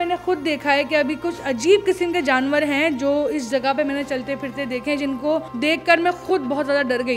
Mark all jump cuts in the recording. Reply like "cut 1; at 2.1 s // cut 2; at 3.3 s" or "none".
cut 1; at 5.5 s